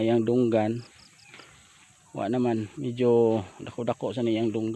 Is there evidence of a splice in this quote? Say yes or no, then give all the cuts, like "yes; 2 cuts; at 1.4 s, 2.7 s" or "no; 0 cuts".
no; 0 cuts